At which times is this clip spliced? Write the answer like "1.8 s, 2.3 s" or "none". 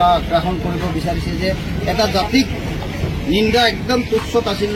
none